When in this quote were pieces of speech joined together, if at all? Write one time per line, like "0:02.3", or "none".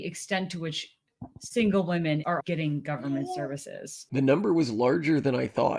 0:02.3
0:04.0